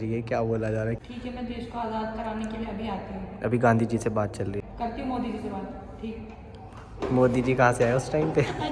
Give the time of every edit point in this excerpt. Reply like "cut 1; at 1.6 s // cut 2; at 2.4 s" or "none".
cut 1; at 1.0 s // cut 2; at 4.6 s